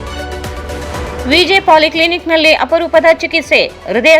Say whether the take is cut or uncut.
cut